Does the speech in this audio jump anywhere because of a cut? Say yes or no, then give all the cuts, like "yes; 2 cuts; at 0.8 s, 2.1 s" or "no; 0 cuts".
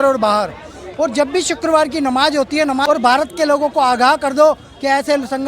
yes; 1 cut; at 2.8 s